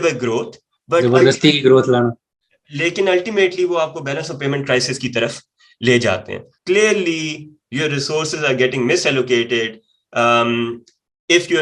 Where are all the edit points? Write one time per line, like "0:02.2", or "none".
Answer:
0:06.5